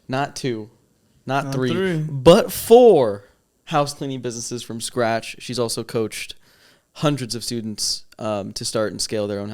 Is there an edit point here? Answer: no; 0 cuts

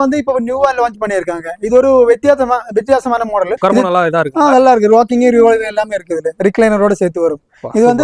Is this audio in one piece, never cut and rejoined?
no; 1 cut; at 3.5 s

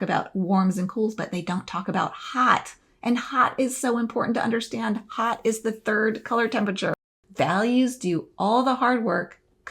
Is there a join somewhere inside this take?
yes; 1 cut; at 7.1 s

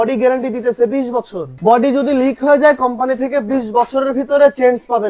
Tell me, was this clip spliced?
yes; 1 cut; at 1.5 s

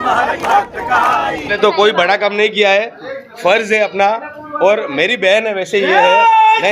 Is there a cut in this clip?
yes; 1 cut; at 1.5 s

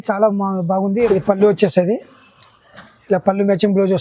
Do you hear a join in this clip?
yes; 1 cut; at 1.1 s

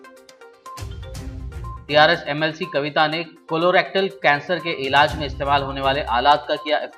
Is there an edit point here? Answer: no; 0 cuts

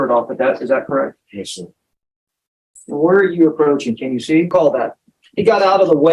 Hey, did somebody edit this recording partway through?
yes; 1 cut; at 4.5 s

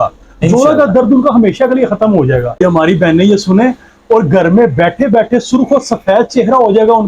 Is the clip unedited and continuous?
no; 1 cut; at 2.6 s

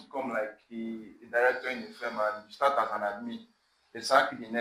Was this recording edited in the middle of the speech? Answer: no; 0 cuts

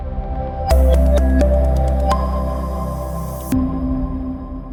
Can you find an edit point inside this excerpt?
no; 0 cuts

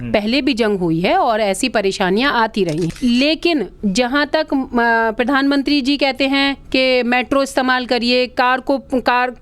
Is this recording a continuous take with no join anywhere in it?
no; 1 cut; at 2.9 s

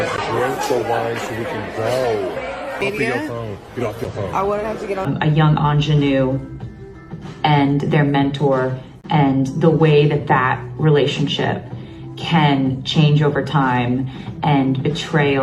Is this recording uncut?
no; 2 cuts; at 2.8 s, 5.1 s

